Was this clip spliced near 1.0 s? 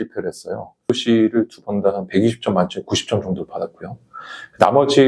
yes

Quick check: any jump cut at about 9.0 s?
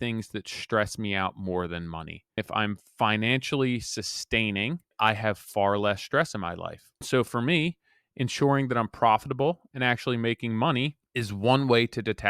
no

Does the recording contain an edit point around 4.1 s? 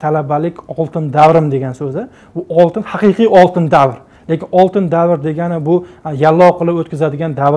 no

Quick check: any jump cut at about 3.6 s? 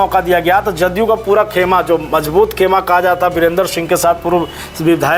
no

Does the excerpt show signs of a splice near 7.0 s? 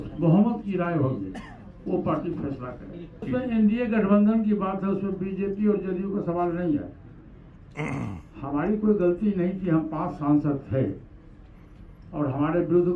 no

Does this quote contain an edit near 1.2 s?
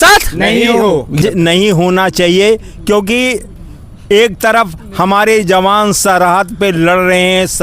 yes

